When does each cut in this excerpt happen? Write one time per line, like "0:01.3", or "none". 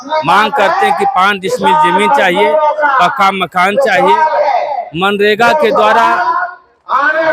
none